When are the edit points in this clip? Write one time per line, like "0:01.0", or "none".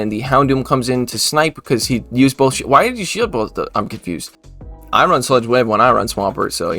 0:04.7